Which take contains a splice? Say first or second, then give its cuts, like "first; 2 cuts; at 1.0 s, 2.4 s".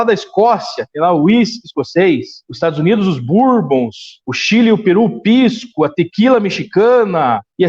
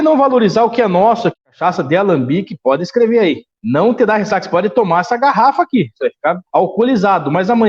second; 1 cut; at 1.3 s